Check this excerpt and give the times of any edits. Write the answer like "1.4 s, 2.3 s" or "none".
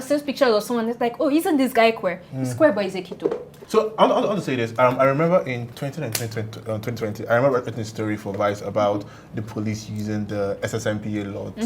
none